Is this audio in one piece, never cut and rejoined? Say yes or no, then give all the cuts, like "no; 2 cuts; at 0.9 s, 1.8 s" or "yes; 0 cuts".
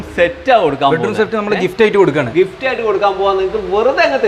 yes; 0 cuts